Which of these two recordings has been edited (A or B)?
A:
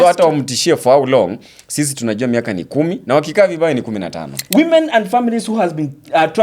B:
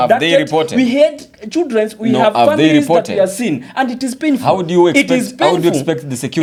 A